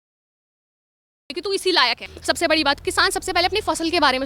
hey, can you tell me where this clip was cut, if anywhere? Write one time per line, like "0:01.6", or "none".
0:02.1